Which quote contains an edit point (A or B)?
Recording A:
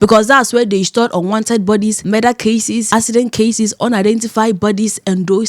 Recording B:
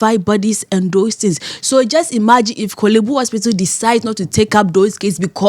A